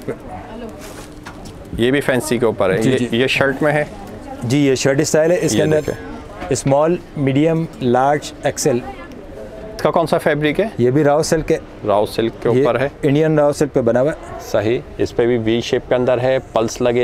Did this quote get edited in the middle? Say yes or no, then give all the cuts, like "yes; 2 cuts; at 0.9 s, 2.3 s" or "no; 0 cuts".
yes; 1 cut; at 9.8 s